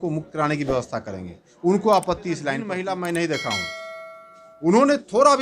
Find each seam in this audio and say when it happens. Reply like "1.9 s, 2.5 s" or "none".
2.7 s